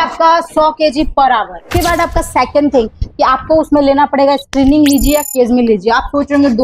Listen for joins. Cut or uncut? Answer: cut